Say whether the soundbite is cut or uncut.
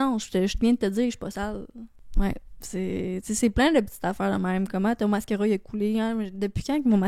cut